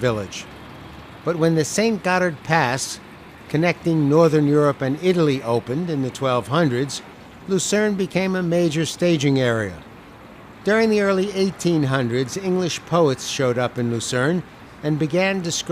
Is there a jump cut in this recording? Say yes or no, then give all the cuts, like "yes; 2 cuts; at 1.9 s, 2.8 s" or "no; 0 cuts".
no; 0 cuts